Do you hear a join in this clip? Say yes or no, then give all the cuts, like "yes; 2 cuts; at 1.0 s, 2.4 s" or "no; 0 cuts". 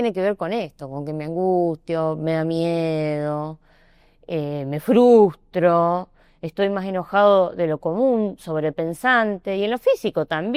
no; 0 cuts